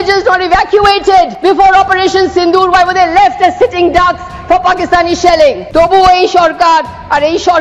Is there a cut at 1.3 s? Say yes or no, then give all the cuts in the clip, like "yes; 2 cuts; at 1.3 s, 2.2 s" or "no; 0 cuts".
yes; 2 cuts; at 1.3 s, 5.6 s